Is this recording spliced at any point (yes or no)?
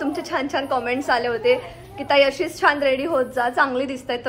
no